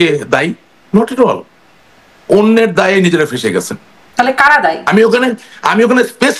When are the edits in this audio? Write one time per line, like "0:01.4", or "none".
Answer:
none